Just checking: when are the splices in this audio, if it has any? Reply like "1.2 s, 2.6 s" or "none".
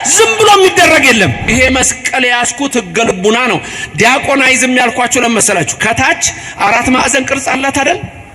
1.5 s